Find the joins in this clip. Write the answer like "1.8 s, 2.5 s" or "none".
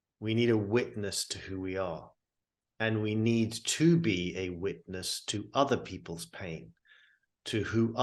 none